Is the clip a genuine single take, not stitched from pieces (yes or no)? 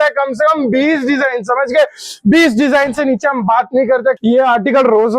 no